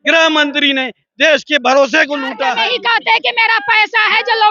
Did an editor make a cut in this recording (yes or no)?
yes